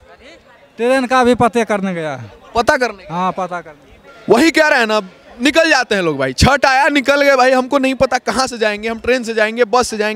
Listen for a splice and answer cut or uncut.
uncut